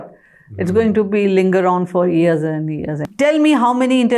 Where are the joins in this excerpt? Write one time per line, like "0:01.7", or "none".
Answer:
0:03.0

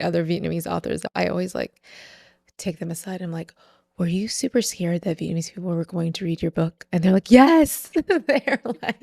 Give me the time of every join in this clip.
0:01.0

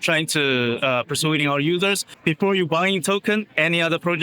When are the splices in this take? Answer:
0:02.1

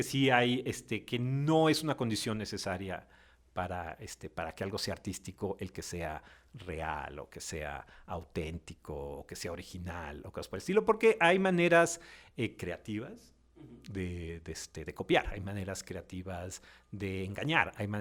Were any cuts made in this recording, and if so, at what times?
none

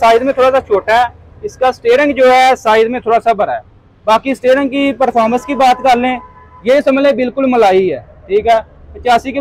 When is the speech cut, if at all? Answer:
none

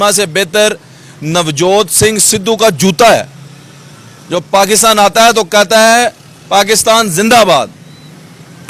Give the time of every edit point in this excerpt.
none

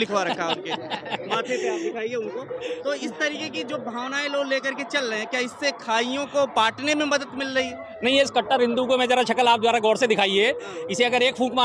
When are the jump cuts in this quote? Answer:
none

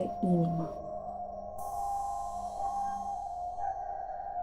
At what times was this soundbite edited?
0:01.0

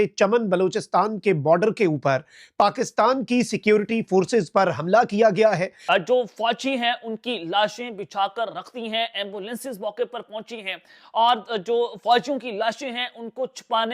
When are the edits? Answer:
0:05.7

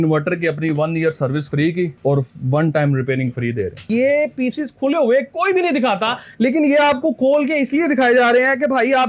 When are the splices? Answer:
0:03.9

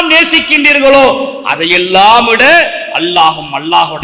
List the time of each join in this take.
none

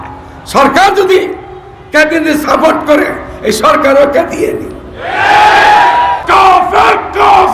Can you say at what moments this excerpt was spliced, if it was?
0:06.2

